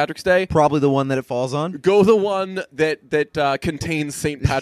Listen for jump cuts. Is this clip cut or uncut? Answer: uncut